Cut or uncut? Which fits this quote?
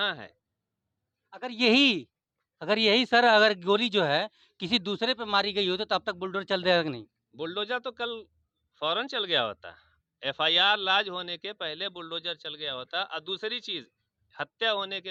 uncut